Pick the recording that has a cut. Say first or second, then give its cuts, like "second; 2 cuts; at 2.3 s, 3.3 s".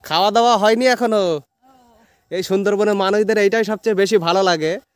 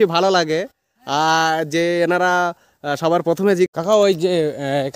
second; 1 cut; at 3.7 s